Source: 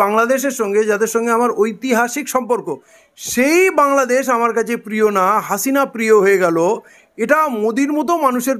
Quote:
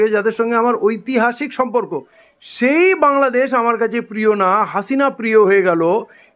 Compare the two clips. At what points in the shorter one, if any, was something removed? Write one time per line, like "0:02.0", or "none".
none